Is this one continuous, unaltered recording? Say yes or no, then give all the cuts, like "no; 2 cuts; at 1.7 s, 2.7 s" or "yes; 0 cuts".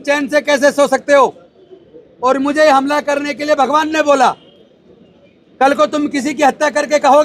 yes; 0 cuts